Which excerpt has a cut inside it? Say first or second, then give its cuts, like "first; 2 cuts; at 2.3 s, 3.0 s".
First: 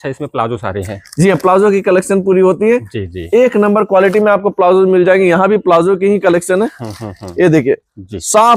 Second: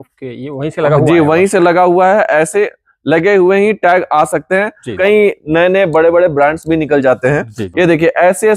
second; 2 cuts; at 4.9 s, 7.6 s